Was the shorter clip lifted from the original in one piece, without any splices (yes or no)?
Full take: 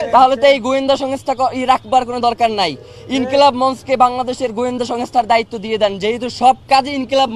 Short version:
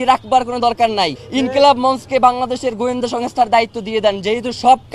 no